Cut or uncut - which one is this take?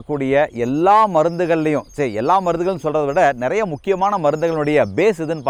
uncut